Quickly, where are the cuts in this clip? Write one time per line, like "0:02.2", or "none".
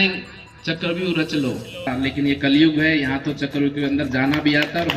0:01.9